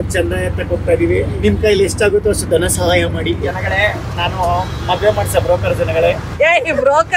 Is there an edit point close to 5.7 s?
no; 2 cuts; at 1.4 s, 3.4 s

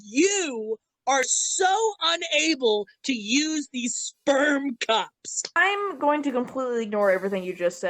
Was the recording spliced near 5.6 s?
yes; 1 cut; at 5.6 s

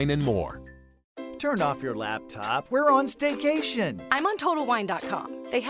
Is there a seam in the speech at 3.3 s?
no; 1 cut; at 1.3 s

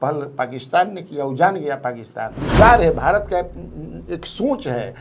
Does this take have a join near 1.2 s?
no; 1 cut; at 2.4 s

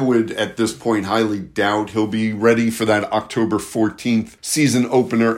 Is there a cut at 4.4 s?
yes; 1 cut; at 4.4 s

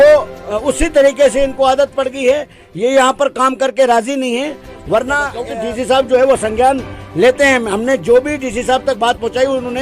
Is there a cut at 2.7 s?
no; 1 cut; at 5.4 s

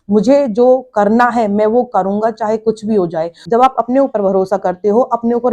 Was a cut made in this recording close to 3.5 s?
yes; 1 cut; at 3.5 s

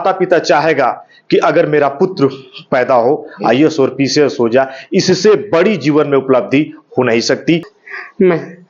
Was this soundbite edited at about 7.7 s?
yes; 1 cut; at 7.7 s

